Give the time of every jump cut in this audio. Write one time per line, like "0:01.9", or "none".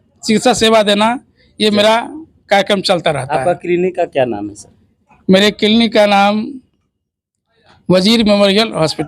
none

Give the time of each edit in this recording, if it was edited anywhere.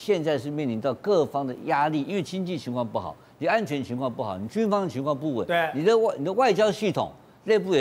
none

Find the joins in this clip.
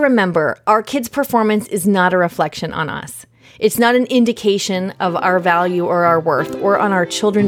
none

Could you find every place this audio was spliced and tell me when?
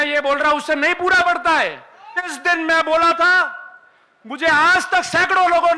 0:02.4

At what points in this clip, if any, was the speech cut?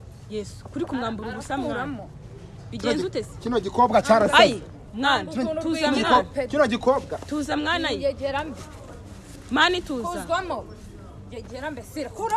none

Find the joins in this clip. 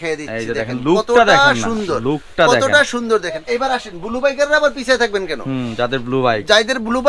0:03.4

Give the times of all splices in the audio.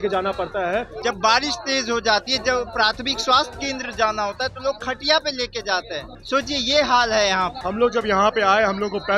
0:00.9
0:06.1
0:07.6

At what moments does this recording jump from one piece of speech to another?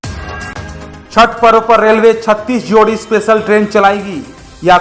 0:01.0

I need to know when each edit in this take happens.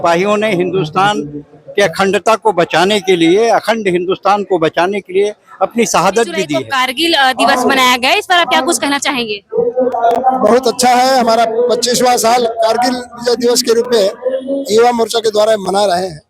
0:06.6

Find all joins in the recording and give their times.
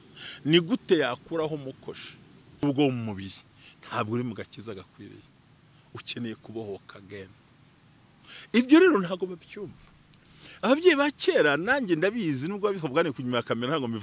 0:02.6

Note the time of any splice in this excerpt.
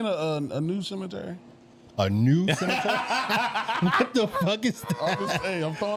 none

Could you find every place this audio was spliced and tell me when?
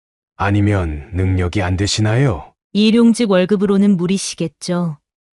0:02.5

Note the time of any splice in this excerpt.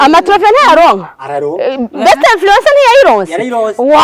none

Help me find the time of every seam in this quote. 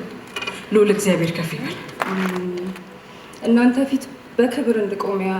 0:01.9

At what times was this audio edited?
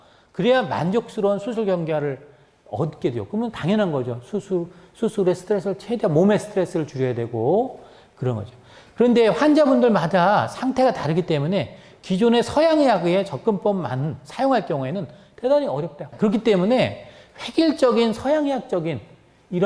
none

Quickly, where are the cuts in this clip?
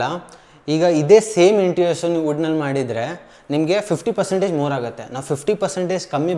none

